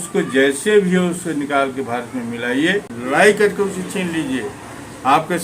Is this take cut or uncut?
cut